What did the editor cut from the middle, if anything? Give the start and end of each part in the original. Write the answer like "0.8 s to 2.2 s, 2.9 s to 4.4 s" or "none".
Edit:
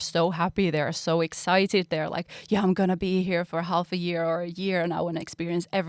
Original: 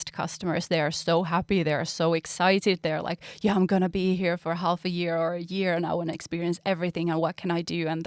none